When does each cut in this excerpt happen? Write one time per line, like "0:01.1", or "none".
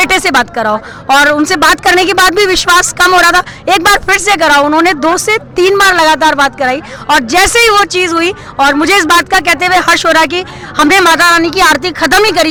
none